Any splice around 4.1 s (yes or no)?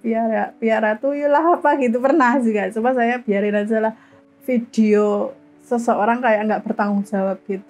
yes